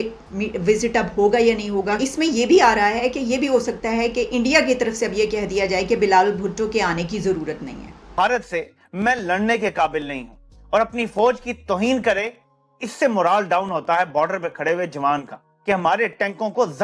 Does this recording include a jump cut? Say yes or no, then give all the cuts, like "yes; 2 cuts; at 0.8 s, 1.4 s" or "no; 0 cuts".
yes; 1 cut; at 8.0 s